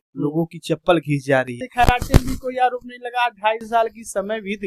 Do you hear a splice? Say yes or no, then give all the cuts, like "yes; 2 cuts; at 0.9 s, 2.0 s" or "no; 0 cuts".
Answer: yes; 1 cut; at 1.7 s